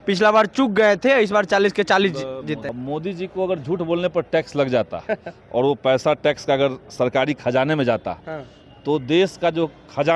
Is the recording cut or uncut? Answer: cut